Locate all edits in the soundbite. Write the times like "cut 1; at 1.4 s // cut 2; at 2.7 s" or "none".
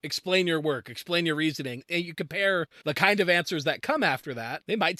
cut 1; at 2.7 s